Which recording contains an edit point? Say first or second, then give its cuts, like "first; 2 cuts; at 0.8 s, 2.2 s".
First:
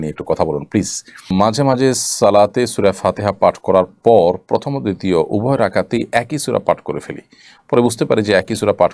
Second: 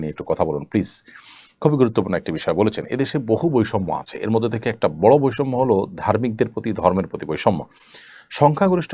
first; 1 cut; at 1.3 s